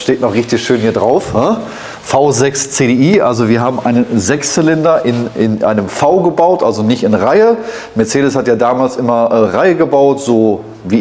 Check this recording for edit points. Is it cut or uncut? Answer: uncut